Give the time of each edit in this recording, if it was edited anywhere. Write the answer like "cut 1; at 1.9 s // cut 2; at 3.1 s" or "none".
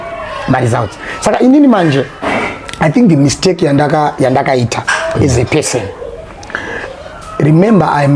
none